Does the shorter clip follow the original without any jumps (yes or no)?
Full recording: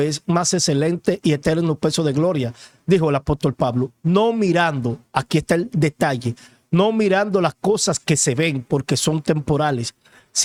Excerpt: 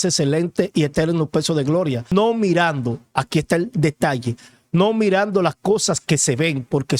no